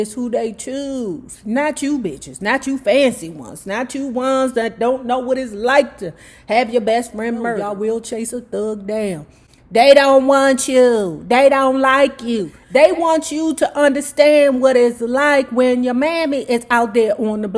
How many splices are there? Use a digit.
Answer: 0